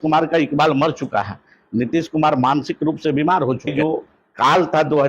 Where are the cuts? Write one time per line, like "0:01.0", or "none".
0:03.7